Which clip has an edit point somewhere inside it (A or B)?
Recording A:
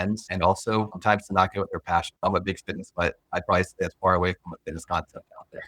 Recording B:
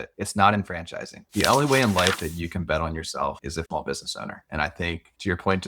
B